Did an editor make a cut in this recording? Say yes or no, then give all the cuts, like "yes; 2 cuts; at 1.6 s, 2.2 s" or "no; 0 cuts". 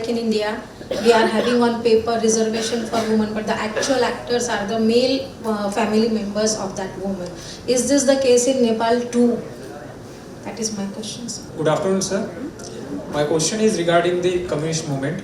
yes; 1 cut; at 11.4 s